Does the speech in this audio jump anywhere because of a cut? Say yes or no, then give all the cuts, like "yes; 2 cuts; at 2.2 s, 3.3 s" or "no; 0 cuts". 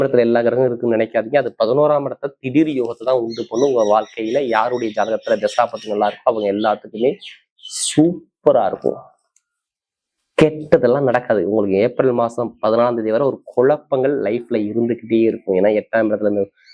no; 0 cuts